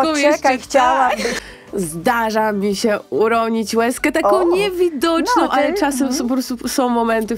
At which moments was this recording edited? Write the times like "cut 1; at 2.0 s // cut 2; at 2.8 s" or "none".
cut 1; at 1.4 s